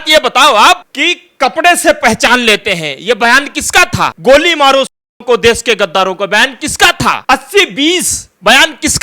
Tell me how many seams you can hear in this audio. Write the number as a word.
three